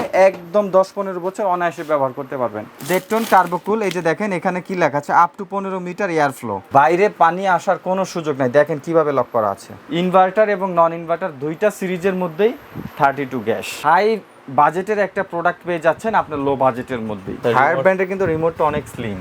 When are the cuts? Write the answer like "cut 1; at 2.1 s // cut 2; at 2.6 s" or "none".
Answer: cut 1; at 2.7 s // cut 2; at 6.6 s // cut 3; at 9.7 s // cut 4; at 13.7 s // cut 5; at 17.4 s